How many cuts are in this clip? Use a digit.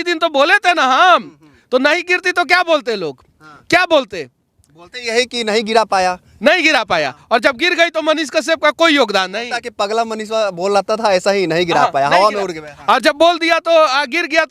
0